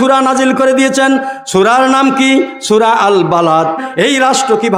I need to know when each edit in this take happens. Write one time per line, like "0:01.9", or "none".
none